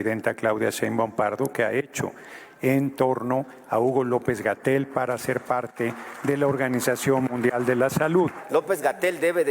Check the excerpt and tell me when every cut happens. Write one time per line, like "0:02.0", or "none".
0:08.4